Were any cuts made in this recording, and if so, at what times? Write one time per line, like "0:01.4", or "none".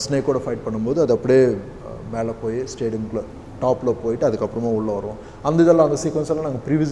none